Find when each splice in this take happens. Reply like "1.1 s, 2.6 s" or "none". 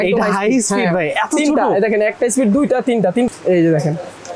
3.3 s